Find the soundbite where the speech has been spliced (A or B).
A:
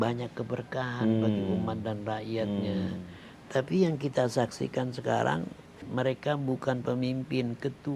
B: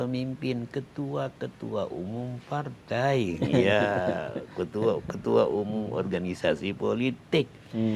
A